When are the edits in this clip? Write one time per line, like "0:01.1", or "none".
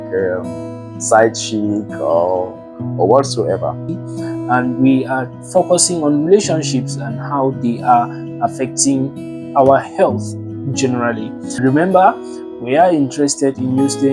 0:04.1
0:11.6

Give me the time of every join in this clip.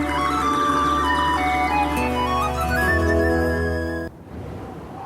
0:04.1

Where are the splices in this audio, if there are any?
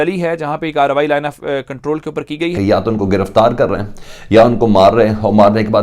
0:02.5

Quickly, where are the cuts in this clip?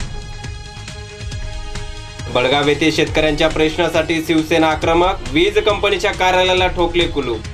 0:01.2
0:02.3

